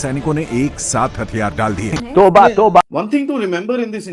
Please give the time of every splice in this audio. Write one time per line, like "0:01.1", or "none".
0:01.9
0:02.8